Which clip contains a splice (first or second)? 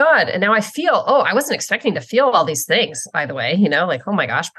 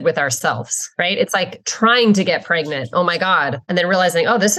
second